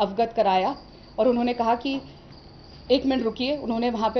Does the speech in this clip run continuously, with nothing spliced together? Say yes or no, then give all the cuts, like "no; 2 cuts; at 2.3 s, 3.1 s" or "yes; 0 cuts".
yes; 0 cuts